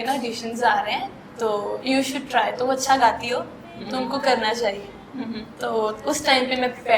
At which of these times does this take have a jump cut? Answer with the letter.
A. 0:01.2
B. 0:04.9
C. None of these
A